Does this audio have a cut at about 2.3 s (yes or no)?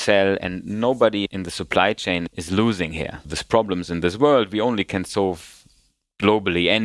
yes